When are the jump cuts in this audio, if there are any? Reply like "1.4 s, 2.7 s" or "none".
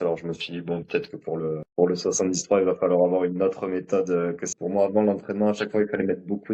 4.5 s